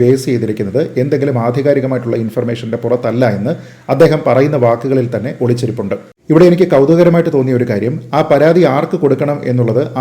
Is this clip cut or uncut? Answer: cut